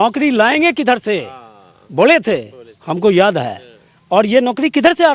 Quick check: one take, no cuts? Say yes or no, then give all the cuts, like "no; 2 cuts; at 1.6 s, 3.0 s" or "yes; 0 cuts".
yes; 0 cuts